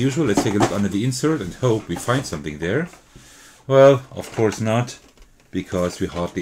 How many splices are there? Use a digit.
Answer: 0